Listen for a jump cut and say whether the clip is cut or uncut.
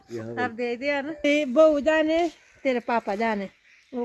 cut